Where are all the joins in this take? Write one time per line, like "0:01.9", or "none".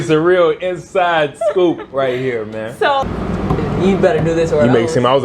0:03.1